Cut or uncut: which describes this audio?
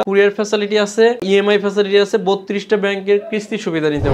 cut